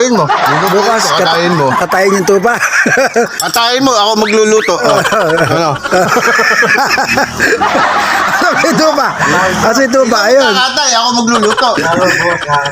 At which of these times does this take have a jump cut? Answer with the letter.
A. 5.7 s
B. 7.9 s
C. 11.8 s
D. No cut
C